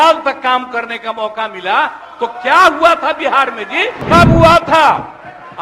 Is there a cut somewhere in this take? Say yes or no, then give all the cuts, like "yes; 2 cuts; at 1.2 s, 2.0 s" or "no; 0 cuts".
yes; 1 cut; at 4.0 s